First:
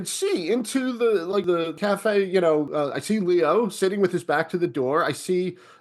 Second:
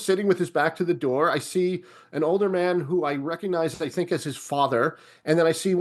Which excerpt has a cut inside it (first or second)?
first